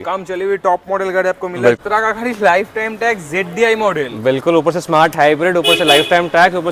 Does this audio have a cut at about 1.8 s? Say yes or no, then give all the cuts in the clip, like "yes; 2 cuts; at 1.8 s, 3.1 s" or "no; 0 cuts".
yes; 1 cut; at 1.8 s